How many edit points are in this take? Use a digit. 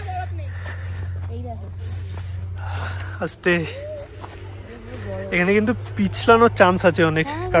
0